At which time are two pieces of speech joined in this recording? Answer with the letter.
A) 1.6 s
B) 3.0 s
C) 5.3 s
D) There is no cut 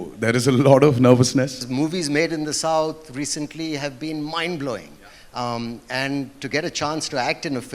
A